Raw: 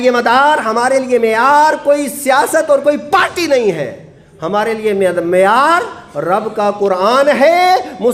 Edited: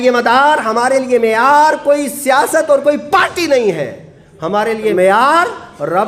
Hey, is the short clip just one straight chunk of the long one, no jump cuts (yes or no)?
no